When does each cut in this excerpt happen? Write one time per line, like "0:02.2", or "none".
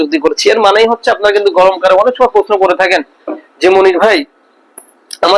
none